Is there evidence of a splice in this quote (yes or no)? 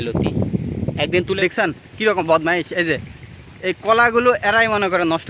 yes